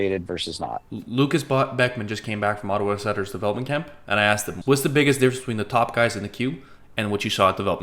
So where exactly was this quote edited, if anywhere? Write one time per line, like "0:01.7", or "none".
0:00.9
0:04.5